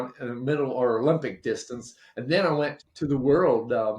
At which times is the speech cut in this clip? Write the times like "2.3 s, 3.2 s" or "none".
2.8 s